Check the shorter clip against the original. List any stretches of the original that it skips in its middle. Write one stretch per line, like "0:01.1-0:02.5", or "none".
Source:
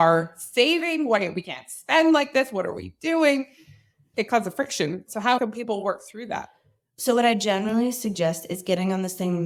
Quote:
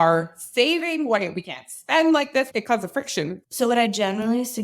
0:02.5-0:04.1
0:05.1-0:06.9